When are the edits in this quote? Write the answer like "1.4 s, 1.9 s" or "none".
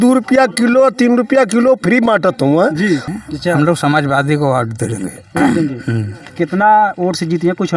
3.1 s